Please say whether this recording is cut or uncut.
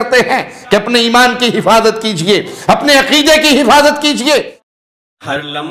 cut